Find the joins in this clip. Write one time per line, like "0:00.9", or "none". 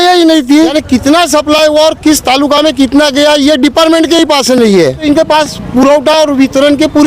0:00.8
0:05.0